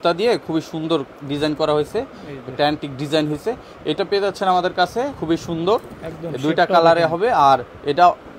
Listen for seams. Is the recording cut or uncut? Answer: uncut